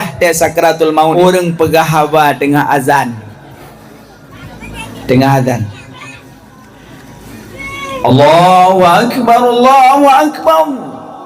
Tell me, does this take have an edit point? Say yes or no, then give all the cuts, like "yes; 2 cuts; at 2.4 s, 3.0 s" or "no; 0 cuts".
yes; 1 cut; at 1.1 s